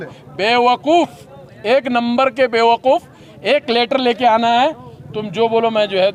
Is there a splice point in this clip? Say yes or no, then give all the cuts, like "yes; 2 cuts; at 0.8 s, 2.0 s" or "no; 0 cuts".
no; 0 cuts